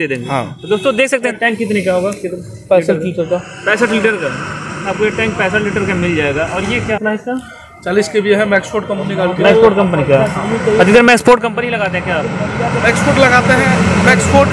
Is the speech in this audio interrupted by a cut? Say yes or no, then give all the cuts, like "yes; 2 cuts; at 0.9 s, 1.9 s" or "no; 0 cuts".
yes; 2 cuts; at 1.3 s, 6.9 s